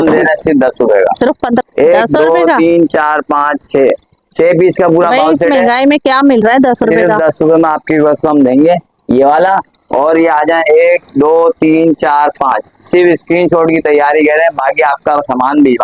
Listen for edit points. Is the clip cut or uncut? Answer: cut